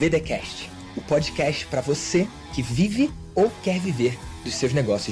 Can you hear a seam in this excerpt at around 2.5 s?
no; 0 cuts

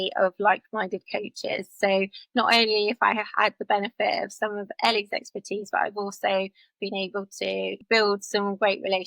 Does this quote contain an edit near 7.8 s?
yes; 1 cut; at 7.8 s

